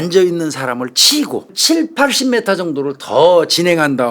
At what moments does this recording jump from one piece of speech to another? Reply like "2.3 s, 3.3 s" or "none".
1.5 s